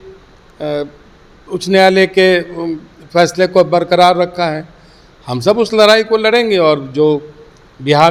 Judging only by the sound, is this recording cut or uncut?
uncut